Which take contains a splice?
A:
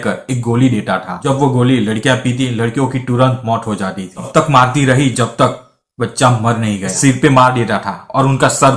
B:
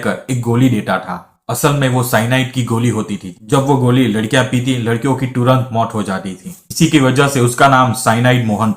A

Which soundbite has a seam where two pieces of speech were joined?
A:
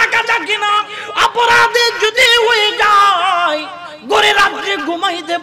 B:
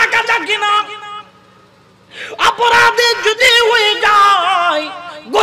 A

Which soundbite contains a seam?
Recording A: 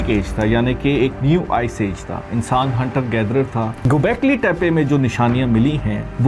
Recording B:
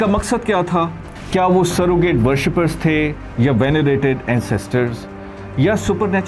A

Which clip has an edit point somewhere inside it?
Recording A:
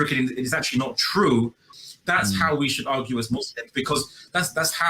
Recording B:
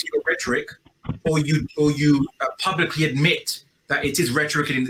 A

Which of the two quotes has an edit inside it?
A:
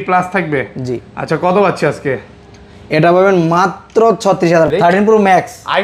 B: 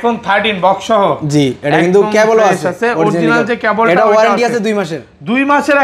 A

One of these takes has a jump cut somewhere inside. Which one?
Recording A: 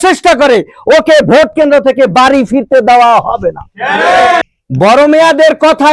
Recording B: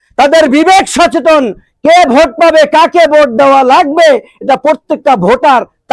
A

